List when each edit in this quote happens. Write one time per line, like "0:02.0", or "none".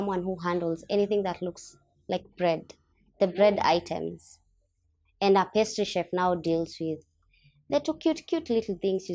none